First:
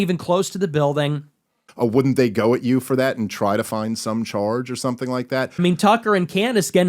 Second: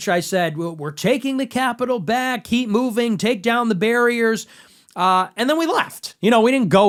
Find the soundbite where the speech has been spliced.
first; 2 cuts; at 1.7 s, 5.5 s

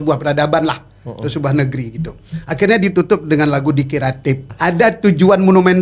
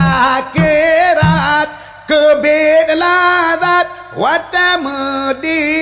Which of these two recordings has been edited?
first; 1 cut; at 4.5 s

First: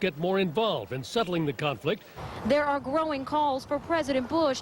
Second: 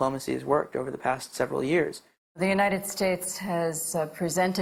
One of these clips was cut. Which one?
first; 1 cut; at 3.1 s

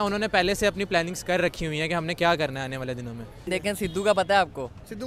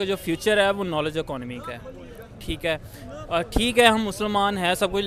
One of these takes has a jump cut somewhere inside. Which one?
first; 1 cut; at 3.4 s

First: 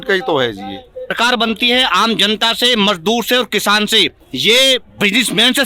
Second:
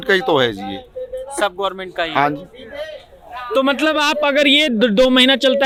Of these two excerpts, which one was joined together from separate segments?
first; 2 cuts; at 1.1 s, 4.2 s

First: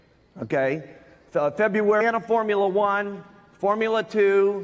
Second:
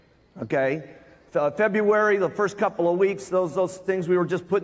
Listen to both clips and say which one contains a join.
second; 1 cut; at 2.0 s

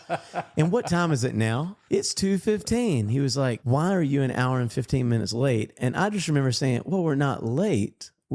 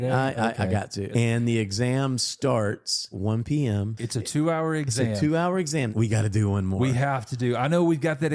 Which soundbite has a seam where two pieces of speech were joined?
second; 4 cuts; at 1.1 s, 3.1 s, 4.0 s, 5.9 s

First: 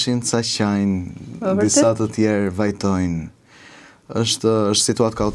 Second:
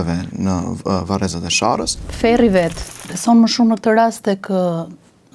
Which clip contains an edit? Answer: second; 2 cuts; at 2.0 s, 2.8 s

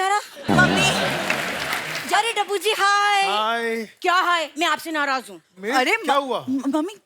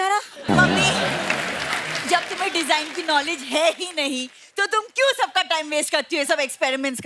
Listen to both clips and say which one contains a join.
first; 1 cut; at 1.9 s

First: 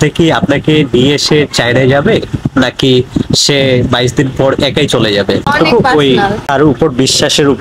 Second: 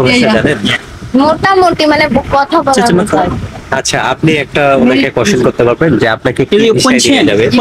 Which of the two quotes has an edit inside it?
first; 2 cuts; at 5.5 s, 6.5 s

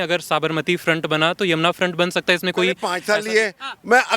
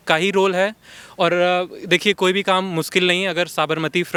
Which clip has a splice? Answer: first; 1 cut; at 2.9 s

